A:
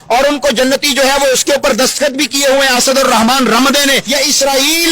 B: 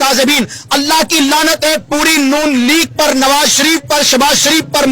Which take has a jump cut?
A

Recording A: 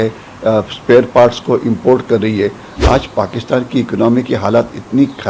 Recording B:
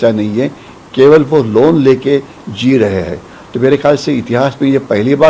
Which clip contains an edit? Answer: A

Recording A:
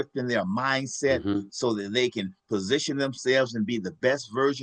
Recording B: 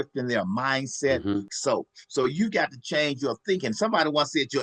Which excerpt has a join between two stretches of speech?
B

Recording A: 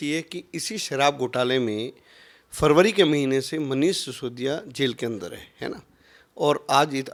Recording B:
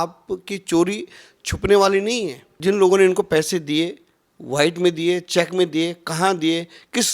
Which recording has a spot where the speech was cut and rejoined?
B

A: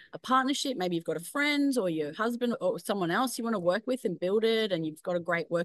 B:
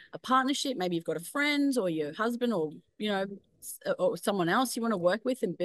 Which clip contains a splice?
A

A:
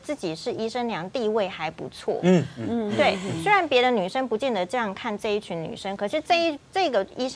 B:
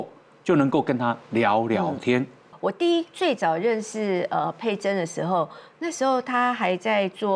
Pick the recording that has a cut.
B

